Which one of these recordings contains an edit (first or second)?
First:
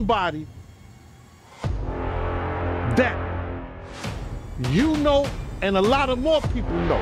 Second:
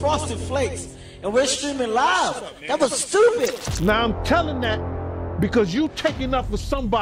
second